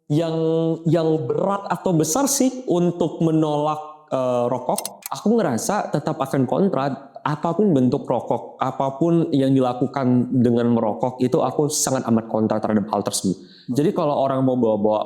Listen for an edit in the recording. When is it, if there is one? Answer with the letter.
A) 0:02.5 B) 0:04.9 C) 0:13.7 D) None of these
B